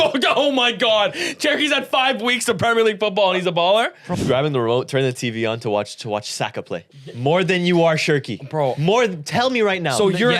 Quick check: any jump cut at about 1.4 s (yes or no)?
no